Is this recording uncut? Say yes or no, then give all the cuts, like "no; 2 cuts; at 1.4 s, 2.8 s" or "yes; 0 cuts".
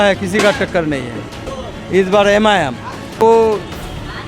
no; 2 cuts; at 1.5 s, 3.2 s